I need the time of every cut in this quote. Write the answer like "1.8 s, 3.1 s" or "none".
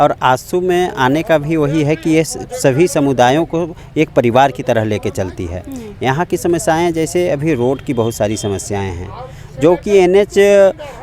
none